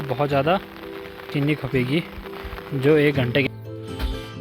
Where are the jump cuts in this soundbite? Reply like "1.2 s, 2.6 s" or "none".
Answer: 1.3 s, 3.5 s